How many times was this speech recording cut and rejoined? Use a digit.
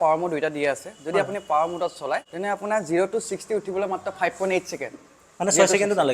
1